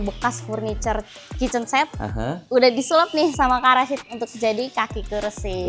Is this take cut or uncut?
uncut